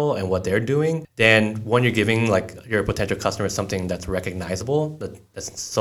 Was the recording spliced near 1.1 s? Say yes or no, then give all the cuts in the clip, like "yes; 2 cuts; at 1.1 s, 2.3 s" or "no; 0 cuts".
yes; 1 cut; at 1.1 s